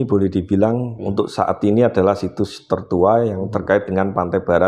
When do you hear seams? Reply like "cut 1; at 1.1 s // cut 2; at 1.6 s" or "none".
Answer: cut 1; at 1.0 s

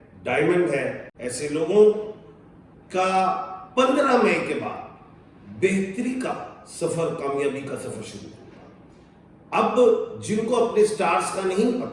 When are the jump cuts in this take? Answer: cut 1; at 1.1 s

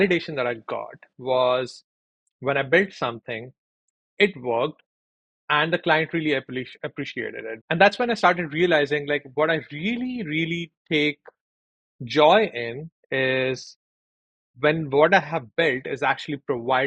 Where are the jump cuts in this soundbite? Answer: cut 1; at 1.0 s // cut 2; at 7.5 s

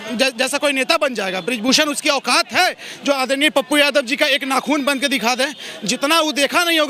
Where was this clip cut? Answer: none

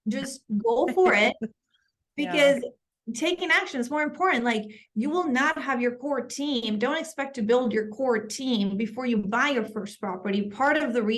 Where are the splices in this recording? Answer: none

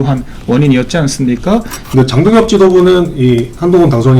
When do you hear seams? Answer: cut 1; at 1.8 s

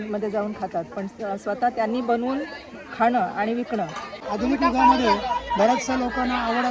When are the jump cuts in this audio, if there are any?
cut 1; at 4.2 s

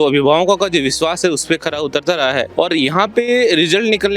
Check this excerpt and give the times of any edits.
cut 1; at 2.5 s

